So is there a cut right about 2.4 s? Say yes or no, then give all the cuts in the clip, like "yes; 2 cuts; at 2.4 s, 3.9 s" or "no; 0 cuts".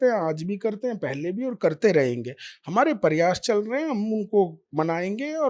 no; 0 cuts